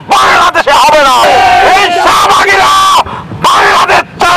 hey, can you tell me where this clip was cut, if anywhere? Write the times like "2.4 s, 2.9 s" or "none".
1.2 s

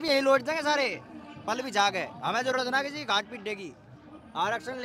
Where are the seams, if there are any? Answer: none

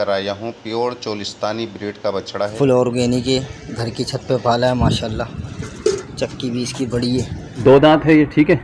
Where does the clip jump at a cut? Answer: 2.5 s, 7.5 s

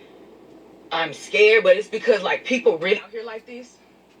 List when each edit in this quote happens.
3.2 s

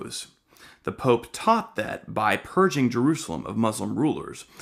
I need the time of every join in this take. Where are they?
2.9 s

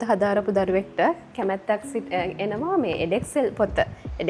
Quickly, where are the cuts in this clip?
none

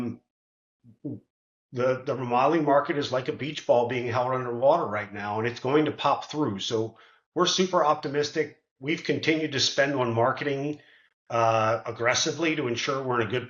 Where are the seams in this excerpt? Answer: none

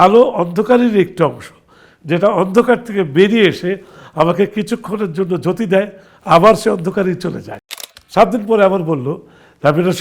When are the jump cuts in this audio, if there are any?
7.8 s

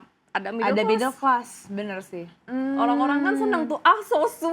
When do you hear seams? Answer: 2.4 s

